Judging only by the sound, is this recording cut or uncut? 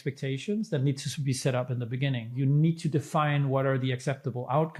cut